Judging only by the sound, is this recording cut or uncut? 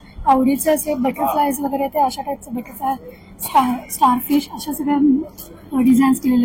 uncut